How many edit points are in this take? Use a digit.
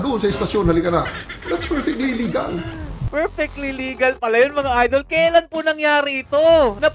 1